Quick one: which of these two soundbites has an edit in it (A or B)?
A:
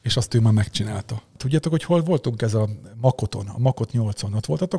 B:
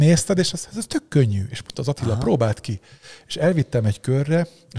A